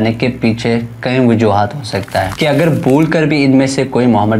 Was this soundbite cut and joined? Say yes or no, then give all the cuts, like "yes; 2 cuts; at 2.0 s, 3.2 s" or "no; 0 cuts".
yes; 1 cut; at 2.3 s